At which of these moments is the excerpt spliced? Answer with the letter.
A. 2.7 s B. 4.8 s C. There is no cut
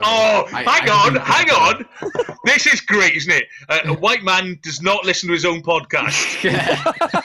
C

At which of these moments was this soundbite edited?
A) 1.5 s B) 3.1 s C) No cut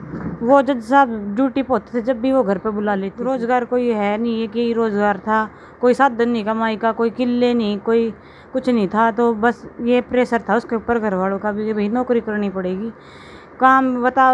B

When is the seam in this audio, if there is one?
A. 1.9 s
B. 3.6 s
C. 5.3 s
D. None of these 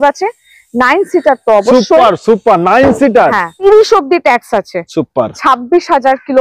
B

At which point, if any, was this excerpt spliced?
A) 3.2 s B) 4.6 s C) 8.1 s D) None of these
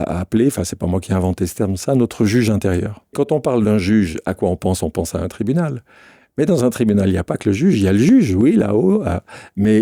A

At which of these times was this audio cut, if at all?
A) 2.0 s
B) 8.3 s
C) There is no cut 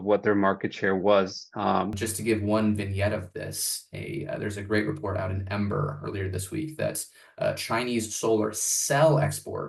A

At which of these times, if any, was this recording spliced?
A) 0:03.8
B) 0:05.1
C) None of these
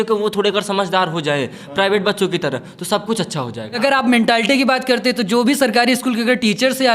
A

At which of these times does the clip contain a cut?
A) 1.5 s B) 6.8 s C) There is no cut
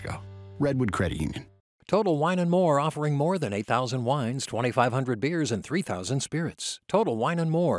A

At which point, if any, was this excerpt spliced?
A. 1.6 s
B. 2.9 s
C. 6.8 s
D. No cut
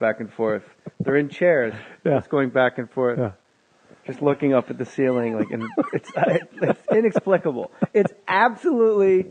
B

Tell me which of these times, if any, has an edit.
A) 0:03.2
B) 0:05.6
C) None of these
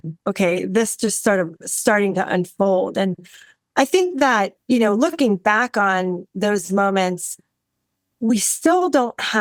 C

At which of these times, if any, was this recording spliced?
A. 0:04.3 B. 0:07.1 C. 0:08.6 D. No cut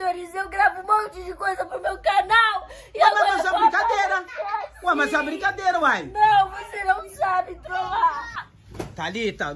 C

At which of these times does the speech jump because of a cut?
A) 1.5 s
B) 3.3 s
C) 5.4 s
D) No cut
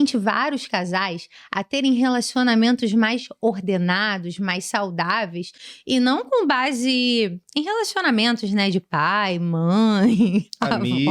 D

